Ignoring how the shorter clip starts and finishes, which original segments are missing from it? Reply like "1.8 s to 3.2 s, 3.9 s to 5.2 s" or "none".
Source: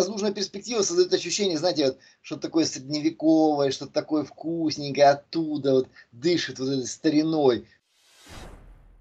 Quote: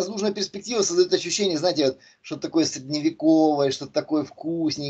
none